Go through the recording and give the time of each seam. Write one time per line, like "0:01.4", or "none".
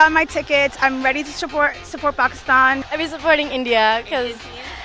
0:02.8

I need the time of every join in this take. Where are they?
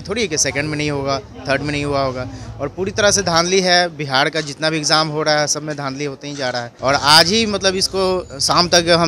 0:06.7

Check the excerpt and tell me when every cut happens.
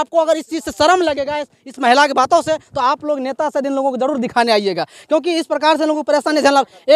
none

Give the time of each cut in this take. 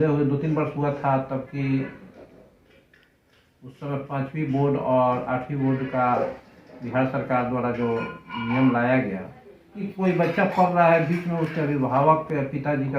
0:09.8

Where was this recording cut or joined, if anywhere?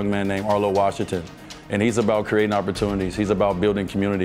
none

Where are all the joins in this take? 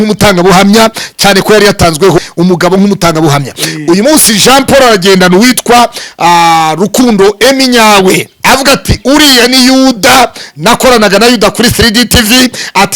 0:02.2

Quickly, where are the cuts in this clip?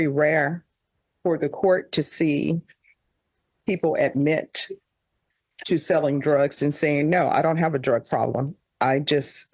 none

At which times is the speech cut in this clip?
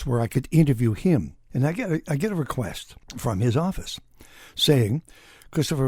none

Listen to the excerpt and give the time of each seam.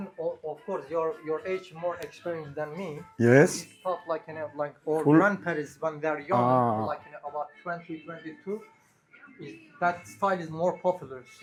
none

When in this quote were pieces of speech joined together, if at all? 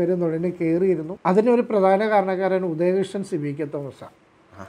0:01.1

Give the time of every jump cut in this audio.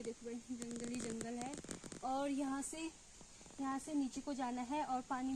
none

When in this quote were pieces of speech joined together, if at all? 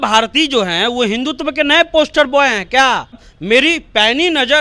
0:03.3

